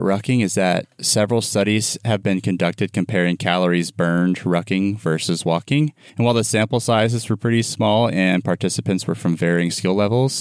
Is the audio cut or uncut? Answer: uncut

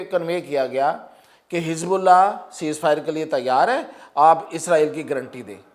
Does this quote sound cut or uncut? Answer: uncut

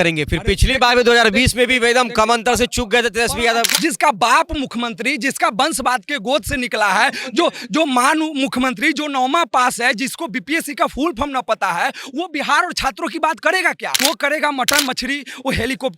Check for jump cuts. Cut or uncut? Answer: cut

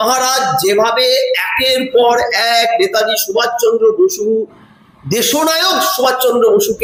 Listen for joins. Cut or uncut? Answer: uncut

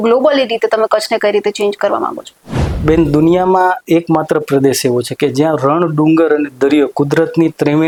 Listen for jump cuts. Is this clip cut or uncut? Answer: uncut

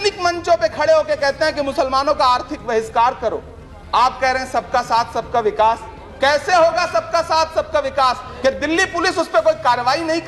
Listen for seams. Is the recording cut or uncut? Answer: cut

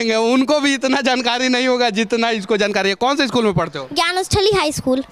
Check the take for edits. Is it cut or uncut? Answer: uncut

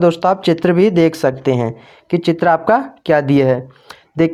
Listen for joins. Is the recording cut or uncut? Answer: uncut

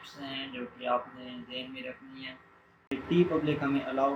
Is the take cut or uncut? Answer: cut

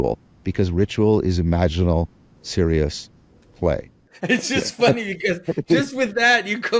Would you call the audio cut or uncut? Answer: cut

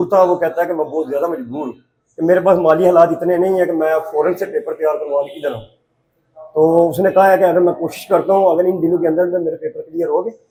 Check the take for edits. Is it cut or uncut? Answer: uncut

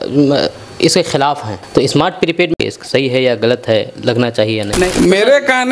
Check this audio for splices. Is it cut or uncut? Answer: cut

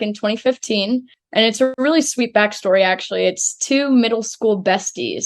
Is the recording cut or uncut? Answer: cut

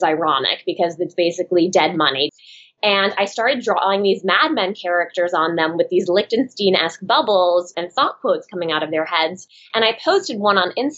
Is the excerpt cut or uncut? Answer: cut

